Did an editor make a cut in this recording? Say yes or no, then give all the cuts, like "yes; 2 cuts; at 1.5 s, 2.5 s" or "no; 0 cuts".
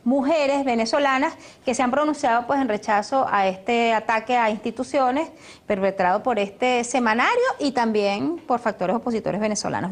yes; 1 cut; at 2.3 s